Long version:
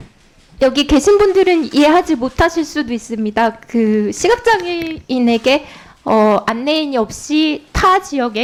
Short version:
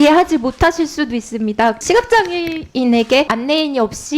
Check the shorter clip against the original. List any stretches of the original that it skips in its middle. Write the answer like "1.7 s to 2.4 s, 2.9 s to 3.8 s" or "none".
3.6 s to 4.2 s, 5.7 s to 6.5 s

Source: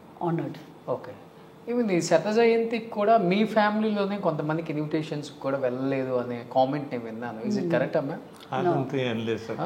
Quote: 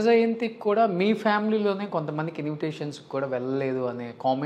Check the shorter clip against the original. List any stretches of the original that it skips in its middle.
none

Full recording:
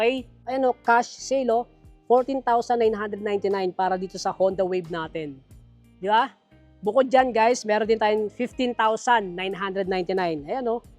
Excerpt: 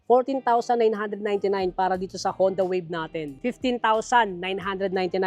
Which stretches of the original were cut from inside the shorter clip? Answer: 5.4 s to 8.3 s

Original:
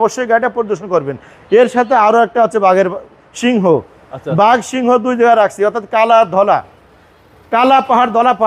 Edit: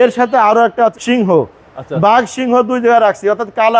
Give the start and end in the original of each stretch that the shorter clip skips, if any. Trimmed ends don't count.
2.5 s to 3.3 s

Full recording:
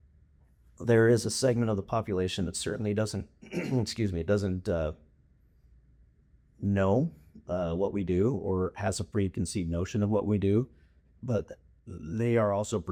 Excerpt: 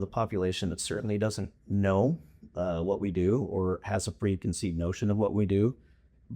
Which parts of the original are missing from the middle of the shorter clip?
3.3 s to 6.4 s

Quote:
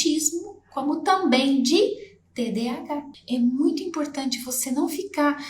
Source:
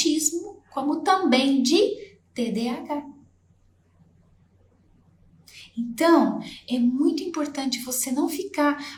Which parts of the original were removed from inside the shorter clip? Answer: 3.1 s to 6.5 s

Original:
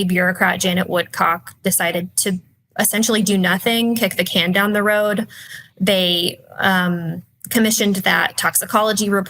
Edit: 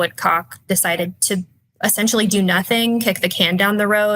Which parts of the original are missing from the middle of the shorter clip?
none

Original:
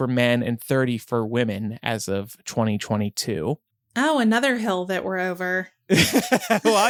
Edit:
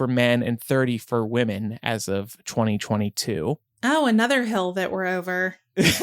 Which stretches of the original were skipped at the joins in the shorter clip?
3.7 s to 3.8 s

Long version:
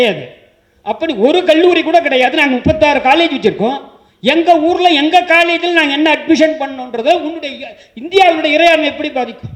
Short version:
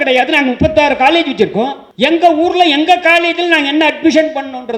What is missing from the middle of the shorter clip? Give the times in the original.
3.9 s to 4.1 s

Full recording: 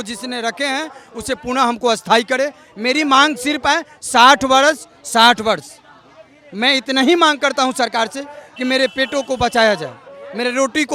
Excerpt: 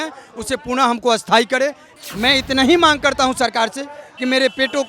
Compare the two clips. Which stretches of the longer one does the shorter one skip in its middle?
2.7 s to 6.3 s

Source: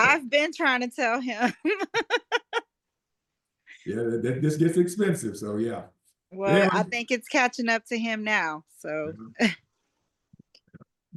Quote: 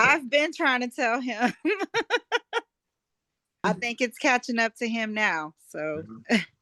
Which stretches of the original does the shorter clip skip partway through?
3.6 s to 6.7 s

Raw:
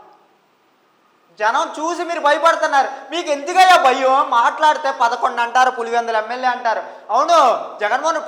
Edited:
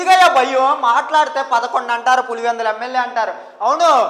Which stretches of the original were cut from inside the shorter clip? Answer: none

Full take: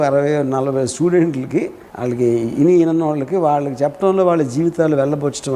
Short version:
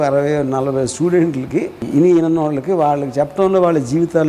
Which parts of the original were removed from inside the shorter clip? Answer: 1.8 s to 2.5 s

